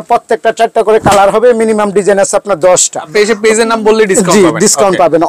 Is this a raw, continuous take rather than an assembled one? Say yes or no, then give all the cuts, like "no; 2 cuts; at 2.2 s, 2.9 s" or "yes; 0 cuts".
no; 1 cut; at 3.1 s